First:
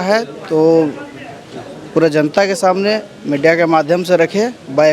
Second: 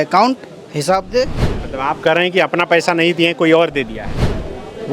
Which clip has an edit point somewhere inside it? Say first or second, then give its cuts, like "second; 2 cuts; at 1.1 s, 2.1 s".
second; 1 cut; at 1.5 s